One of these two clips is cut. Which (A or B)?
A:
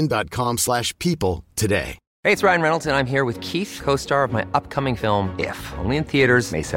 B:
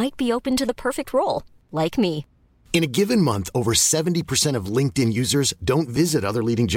A